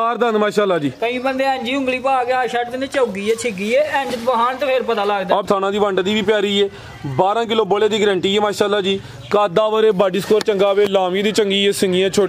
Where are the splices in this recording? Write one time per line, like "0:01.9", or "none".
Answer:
0:05.4